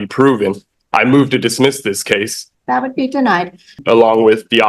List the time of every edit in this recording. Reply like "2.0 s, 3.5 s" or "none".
2.4 s, 3.8 s